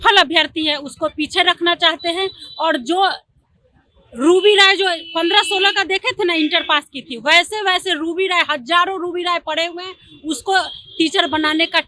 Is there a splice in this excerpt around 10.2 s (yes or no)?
no